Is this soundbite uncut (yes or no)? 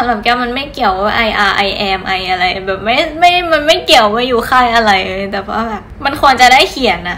yes